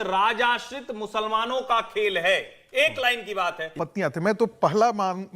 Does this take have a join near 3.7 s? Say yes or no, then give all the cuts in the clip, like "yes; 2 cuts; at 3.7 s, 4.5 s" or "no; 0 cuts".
yes; 1 cut; at 3.7 s